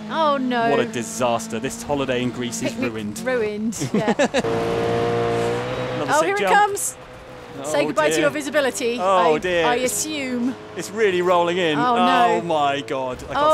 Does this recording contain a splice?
yes; 1 cut; at 4.5 s

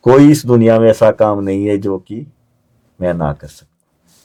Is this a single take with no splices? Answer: yes; 0 cuts

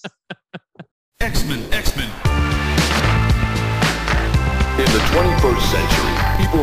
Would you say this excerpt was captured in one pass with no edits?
no; 1 cut; at 1.0 s

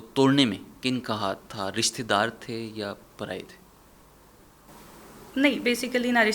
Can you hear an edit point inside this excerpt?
no; 0 cuts

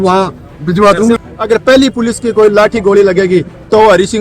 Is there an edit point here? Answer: yes; 1 cut; at 1.3 s

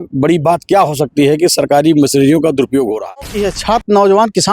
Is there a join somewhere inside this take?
yes; 1 cut; at 3.4 s

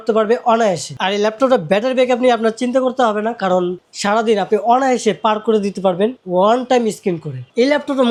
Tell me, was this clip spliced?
no; 0 cuts

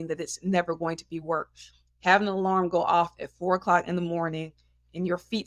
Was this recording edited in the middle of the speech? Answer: no; 0 cuts

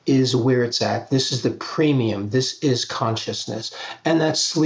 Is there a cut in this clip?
no; 0 cuts

